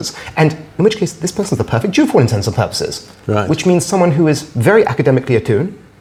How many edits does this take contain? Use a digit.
0